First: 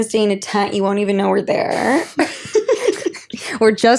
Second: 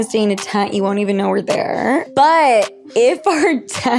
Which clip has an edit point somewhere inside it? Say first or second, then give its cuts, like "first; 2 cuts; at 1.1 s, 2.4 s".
second; 1 cut; at 2.1 s